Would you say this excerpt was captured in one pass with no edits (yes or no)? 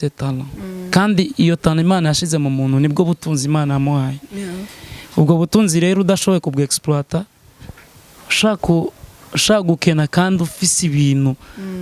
yes